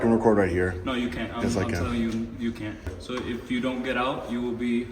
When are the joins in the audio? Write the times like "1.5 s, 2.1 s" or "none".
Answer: 2.9 s